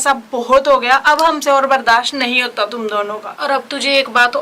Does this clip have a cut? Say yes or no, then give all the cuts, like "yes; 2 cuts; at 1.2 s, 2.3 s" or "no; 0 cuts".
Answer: no; 0 cuts